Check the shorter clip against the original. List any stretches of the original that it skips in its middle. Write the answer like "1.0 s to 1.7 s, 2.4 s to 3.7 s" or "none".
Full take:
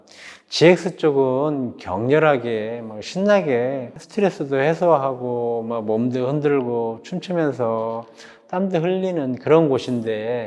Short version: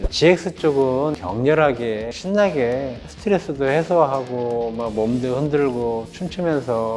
1.6 s to 1.8 s, 2.8 s to 3.0 s